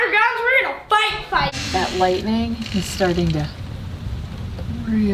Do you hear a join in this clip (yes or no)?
yes